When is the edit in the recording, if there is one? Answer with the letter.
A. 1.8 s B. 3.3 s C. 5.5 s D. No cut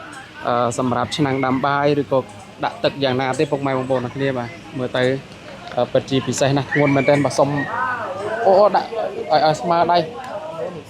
D